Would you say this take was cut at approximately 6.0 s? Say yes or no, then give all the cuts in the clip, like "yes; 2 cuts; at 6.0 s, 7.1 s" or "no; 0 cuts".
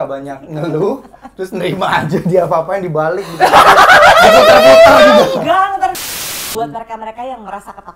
yes; 1 cut; at 6.0 s